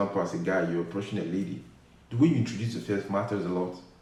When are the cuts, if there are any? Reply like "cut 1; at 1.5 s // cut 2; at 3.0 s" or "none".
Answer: none